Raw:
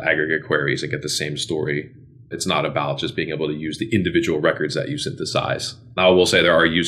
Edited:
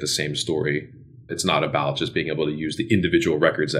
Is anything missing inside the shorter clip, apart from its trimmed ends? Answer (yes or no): no